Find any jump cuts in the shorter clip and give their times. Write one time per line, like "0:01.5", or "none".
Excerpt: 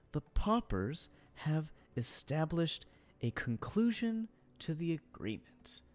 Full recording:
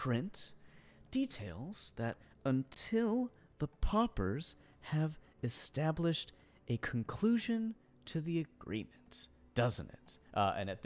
none